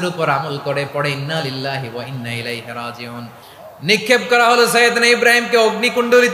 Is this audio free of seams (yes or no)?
no